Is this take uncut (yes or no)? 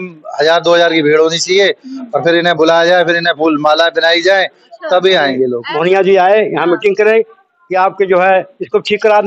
no